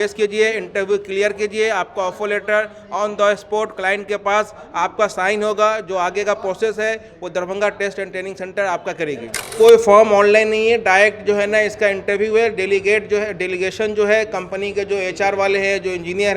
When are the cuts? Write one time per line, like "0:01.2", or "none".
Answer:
0:09.5